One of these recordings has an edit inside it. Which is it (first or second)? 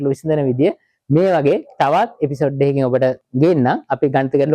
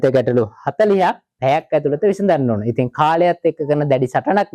first